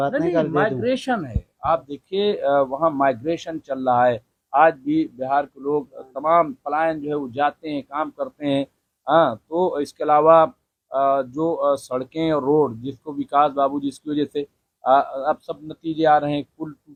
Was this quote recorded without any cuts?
yes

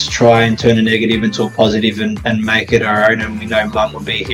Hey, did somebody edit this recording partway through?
no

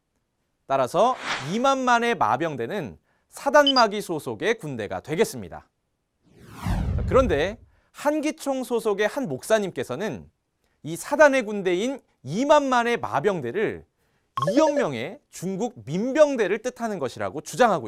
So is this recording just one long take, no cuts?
yes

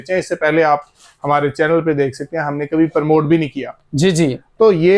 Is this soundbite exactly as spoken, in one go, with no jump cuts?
yes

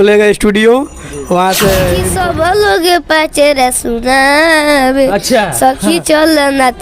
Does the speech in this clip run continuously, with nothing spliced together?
no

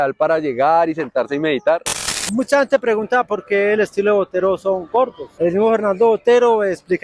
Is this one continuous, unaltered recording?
no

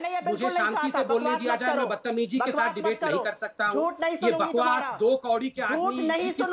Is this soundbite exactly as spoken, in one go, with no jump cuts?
yes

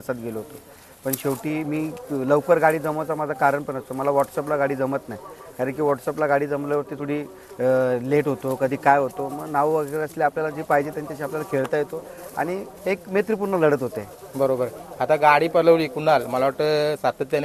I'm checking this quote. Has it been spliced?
no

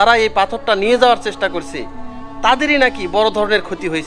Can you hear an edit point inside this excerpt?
no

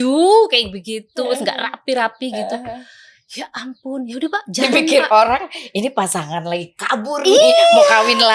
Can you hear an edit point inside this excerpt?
no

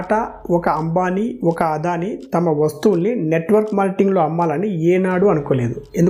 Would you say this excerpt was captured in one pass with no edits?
yes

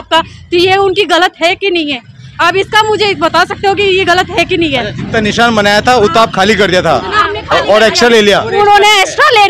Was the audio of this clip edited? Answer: no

